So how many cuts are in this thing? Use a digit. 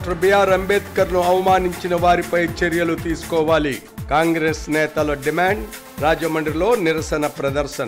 0